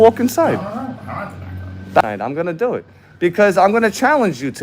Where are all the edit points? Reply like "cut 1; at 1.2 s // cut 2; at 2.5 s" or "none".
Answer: cut 1; at 2.0 s

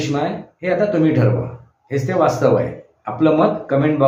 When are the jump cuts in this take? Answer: none

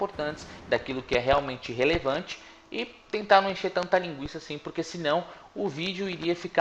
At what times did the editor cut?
none

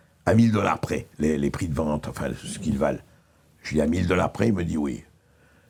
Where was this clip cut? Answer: none

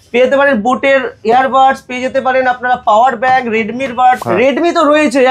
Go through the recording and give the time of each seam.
cut 1; at 4.2 s

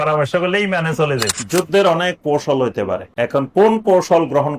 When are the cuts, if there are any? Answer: cut 1; at 1.4 s // cut 2; at 3.1 s

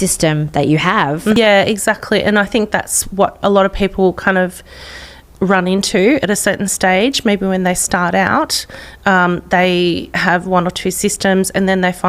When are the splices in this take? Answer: cut 1; at 1.4 s

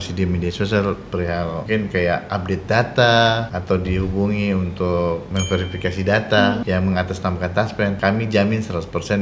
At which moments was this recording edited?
cut 1; at 1.6 s // cut 2; at 3.5 s // cut 3; at 5.3 s // cut 4; at 6.6 s // cut 5; at 8.0 s

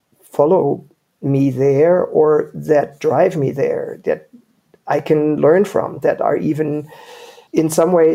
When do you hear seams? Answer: none

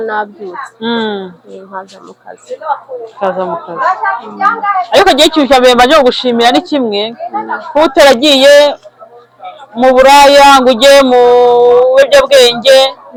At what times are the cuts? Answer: none

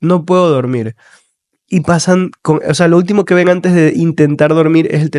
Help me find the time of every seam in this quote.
none

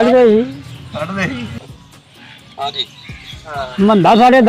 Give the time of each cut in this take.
cut 1; at 1.5 s

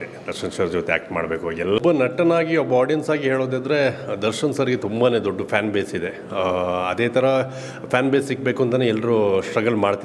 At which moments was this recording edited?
cut 1; at 1.8 s

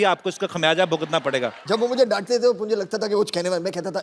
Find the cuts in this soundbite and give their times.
cut 1; at 1.5 s

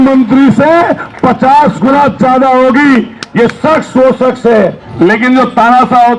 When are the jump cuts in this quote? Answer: cut 1; at 4.8 s

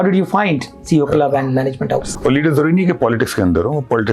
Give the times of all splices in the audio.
cut 1; at 2.1 s

